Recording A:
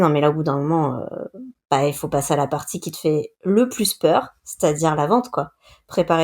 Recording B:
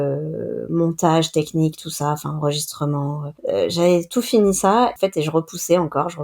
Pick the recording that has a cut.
B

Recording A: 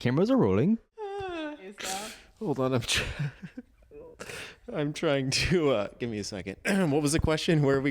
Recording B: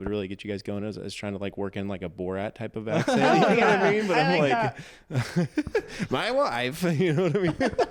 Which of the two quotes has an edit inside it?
A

